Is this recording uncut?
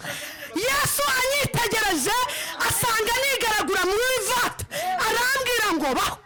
yes; 0 cuts

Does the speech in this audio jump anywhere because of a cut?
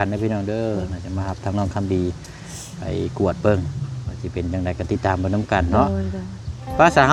no; 0 cuts

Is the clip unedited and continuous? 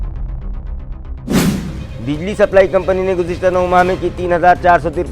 no; 1 cut; at 1.7 s

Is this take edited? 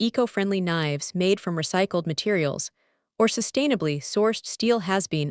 no; 0 cuts

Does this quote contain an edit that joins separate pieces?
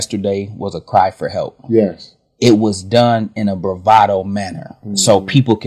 no; 0 cuts

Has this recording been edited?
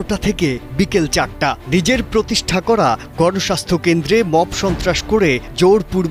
no; 0 cuts

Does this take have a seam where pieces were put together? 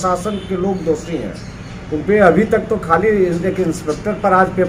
no; 0 cuts

